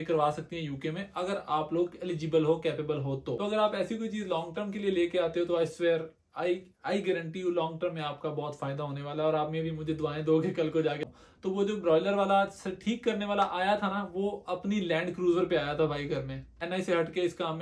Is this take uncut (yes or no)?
no